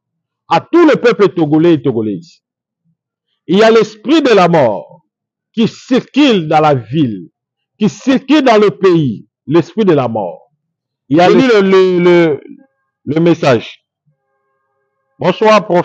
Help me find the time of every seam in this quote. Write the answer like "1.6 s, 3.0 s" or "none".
11.3 s

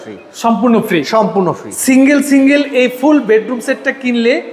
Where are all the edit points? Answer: 1.7 s

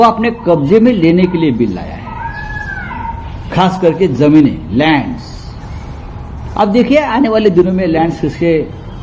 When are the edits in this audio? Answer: none

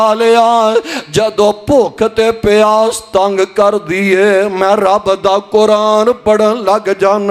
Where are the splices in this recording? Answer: none

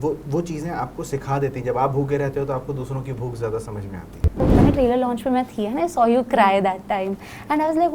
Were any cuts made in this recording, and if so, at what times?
4.4 s

